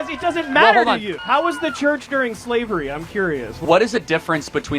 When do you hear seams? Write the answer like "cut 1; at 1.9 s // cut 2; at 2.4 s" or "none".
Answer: cut 1; at 1.1 s // cut 2; at 3.6 s